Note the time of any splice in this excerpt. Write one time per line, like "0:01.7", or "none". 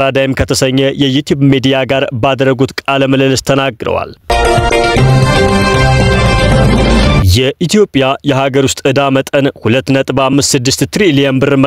0:04.3
0:07.3